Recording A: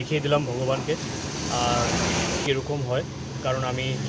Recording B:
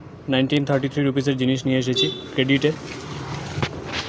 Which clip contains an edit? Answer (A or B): A